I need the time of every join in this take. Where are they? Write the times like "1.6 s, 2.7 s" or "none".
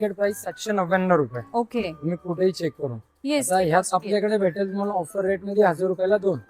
none